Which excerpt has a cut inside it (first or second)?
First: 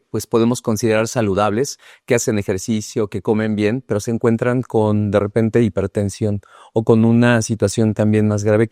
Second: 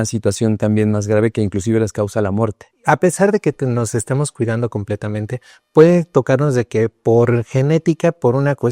second